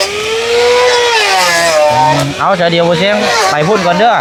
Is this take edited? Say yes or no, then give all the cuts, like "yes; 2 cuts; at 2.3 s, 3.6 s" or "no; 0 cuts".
no; 0 cuts